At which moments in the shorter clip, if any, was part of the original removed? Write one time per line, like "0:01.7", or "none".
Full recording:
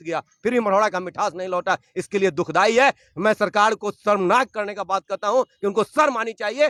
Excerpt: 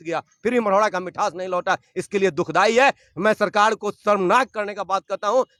none